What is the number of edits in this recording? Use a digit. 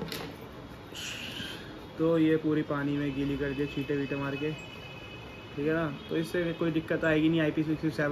1